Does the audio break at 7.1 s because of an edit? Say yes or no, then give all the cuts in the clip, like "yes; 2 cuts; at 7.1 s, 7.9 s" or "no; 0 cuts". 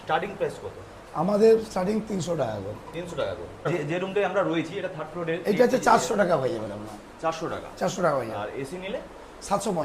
no; 1 cut; at 3.7 s